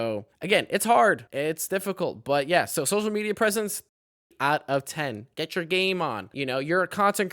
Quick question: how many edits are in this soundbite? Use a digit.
3